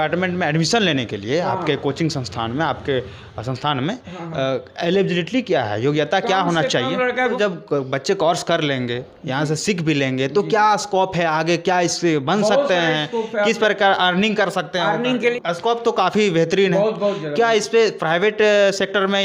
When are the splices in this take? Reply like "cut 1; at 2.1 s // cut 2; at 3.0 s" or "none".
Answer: cut 1; at 7.4 s // cut 2; at 15.3 s